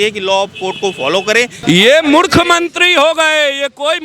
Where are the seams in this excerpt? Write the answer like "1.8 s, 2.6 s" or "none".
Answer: 1.6 s